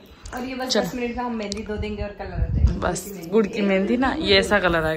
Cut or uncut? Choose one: uncut